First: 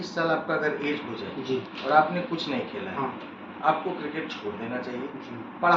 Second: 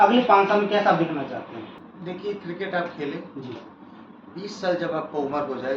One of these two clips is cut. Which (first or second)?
second